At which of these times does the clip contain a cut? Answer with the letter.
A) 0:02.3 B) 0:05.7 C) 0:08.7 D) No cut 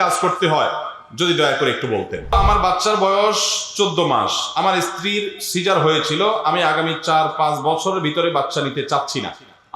A